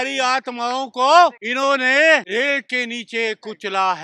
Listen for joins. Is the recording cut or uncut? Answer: cut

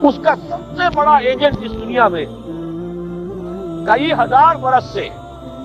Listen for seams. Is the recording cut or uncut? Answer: cut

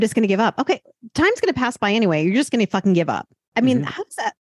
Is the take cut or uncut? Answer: uncut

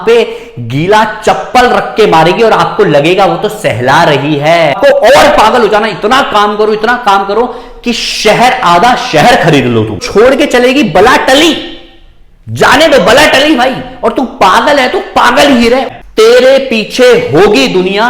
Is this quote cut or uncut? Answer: cut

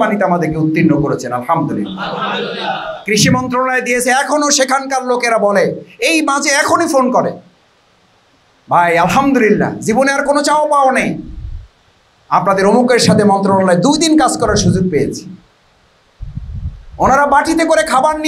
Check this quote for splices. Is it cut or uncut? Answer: uncut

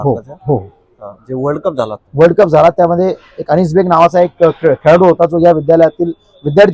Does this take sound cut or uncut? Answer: uncut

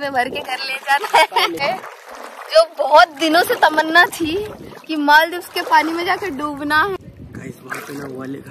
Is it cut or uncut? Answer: cut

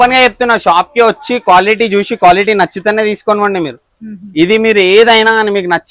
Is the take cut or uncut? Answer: uncut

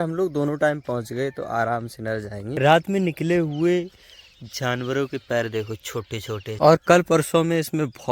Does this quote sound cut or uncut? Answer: cut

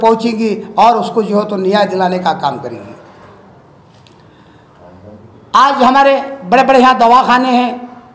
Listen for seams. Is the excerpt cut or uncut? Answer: uncut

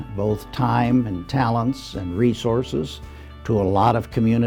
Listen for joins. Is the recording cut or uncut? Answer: uncut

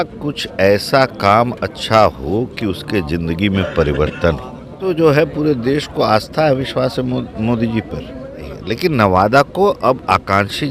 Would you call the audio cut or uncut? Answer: cut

